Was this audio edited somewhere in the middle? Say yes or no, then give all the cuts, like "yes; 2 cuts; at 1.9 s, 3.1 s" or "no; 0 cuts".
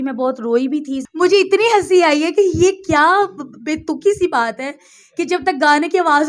yes; 1 cut; at 1.0 s